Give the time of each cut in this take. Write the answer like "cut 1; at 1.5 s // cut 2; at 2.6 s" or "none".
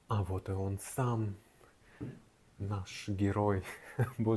none